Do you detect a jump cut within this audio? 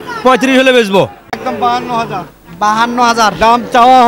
yes; 1 cut; at 1.4 s

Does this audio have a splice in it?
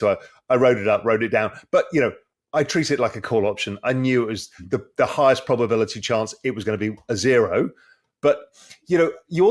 no; 0 cuts

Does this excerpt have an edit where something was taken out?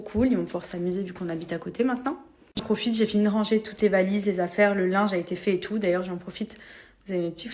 yes; 1 cut; at 2.6 s

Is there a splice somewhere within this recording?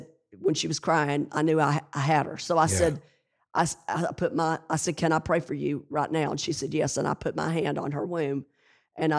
no; 0 cuts

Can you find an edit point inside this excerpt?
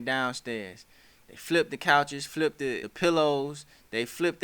yes; 1 cut; at 2.9 s

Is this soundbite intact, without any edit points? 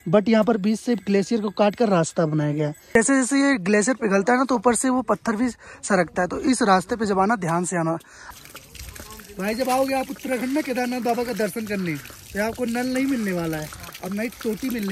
no; 2 cuts; at 2.9 s, 8.2 s

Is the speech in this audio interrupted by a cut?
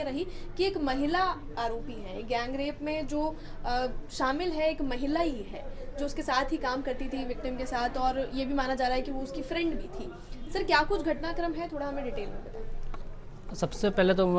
no; 0 cuts

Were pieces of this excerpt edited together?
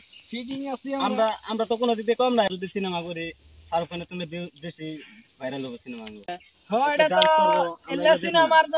yes; 2 cuts; at 2.5 s, 6.3 s

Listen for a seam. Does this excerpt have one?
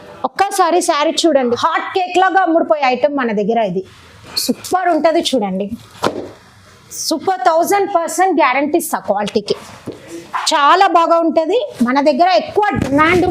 yes; 1 cut; at 1.6 s

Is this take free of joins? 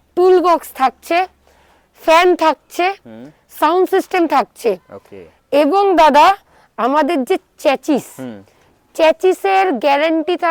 yes; 0 cuts

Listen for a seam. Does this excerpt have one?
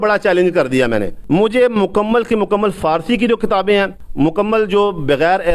yes; 2 cuts; at 1.1 s, 4.0 s

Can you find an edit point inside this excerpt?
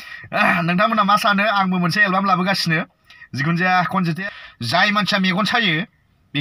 yes; 1 cut; at 4.2 s

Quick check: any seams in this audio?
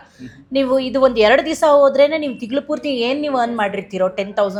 no; 0 cuts

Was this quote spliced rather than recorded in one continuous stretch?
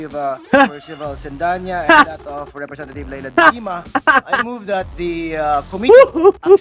no; 0 cuts

